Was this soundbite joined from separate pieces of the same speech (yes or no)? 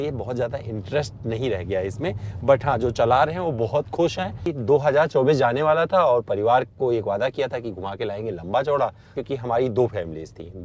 yes